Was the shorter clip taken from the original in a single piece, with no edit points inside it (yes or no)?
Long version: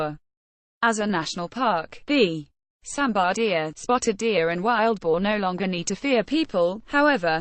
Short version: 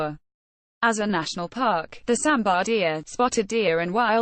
no